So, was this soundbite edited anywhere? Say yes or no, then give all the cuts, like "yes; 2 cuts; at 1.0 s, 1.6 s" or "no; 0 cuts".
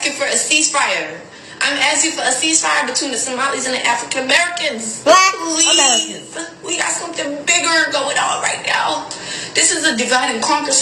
no; 0 cuts